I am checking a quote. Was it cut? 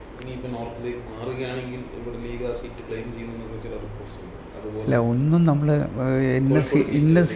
no; 0 cuts

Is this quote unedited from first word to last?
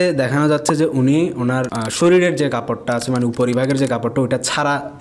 yes; 0 cuts

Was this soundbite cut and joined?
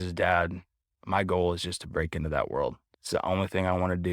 yes; 1 cut; at 2.9 s

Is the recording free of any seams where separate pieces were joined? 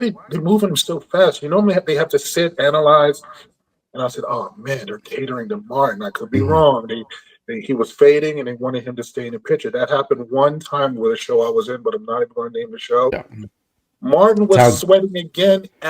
no; 1 cut; at 13.1 s

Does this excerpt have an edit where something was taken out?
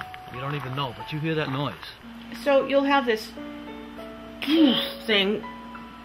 no; 0 cuts

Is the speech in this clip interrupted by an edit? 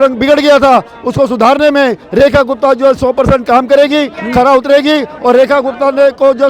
no; 0 cuts

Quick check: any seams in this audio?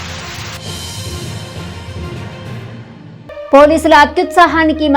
no; 0 cuts

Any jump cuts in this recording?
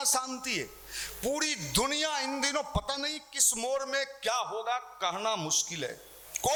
no; 0 cuts

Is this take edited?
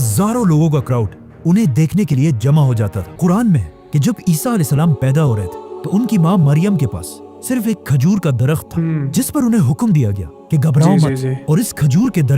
yes; 1 cut; at 3.2 s

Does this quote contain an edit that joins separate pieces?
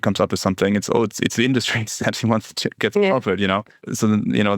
yes; 2 cuts; at 2.7 s, 3.7 s

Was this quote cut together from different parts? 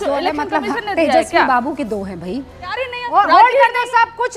yes; 1 cut; at 2.7 s

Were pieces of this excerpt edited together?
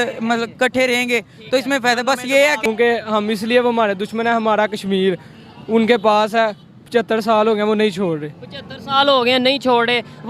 yes; 1 cut; at 2.6 s

